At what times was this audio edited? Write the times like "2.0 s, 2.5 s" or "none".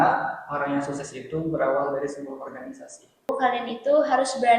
3.3 s

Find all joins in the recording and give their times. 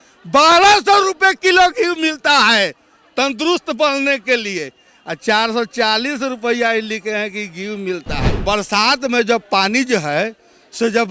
8.3 s

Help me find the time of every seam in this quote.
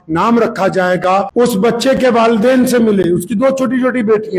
1.3 s

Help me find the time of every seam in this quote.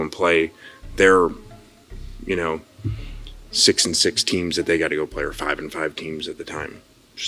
none

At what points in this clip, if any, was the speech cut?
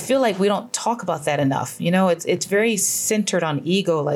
none

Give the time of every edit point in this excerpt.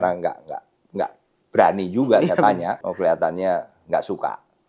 2.8 s

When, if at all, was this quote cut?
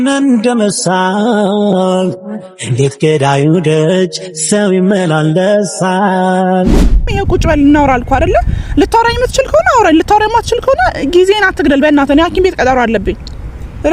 7.1 s

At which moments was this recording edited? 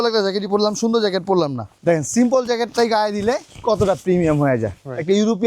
1.7 s

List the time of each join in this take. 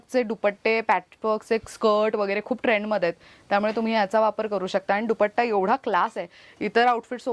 none

